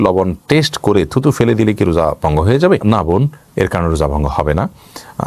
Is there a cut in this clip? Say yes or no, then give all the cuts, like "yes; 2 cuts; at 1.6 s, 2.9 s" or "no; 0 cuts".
no; 0 cuts